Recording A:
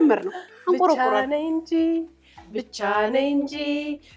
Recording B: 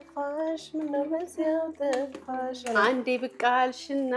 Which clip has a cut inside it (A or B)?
B